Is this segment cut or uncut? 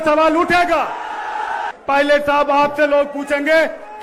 cut